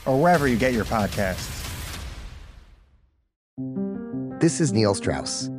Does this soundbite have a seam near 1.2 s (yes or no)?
no